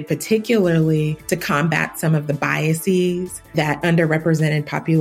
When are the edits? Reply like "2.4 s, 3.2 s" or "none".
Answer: none